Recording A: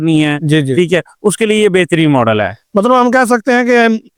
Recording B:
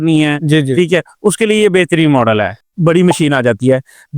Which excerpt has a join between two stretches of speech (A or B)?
B